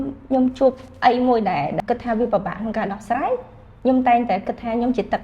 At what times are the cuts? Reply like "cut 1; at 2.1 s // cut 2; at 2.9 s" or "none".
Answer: cut 1; at 1.8 s